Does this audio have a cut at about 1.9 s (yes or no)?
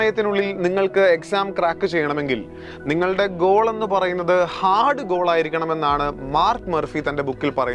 no